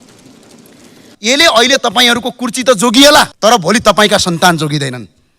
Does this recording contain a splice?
yes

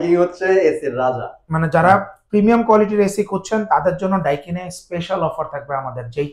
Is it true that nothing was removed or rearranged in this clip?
no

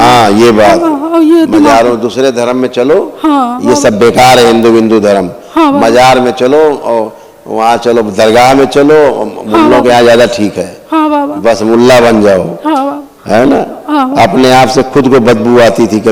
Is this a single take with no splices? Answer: yes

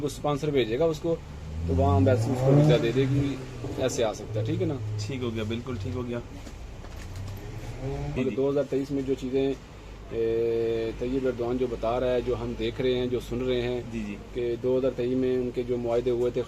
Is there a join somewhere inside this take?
yes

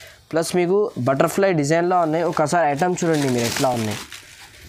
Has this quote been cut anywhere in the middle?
no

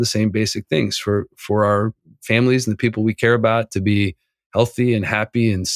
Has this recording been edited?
no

